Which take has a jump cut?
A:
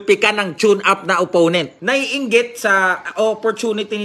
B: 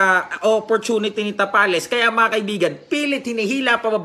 A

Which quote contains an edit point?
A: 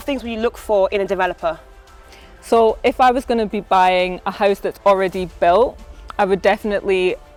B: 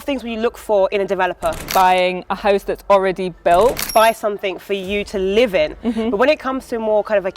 B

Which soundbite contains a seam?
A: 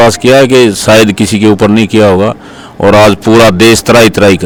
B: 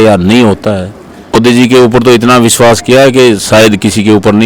B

